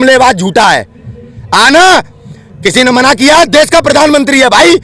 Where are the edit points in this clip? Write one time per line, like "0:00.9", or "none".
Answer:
none